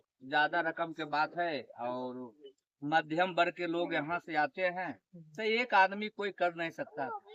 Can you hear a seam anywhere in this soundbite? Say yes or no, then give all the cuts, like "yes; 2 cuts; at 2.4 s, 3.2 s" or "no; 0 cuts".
no; 0 cuts